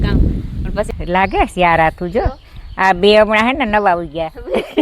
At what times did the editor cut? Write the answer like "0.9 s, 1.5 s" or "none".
0.9 s